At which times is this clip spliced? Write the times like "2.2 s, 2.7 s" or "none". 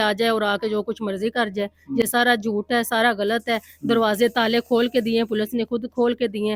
none